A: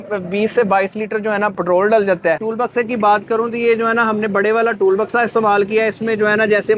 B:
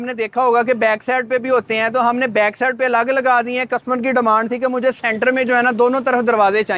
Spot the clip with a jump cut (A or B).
A